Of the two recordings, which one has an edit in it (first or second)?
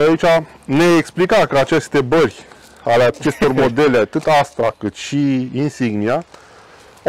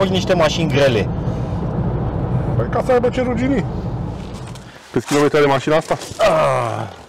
second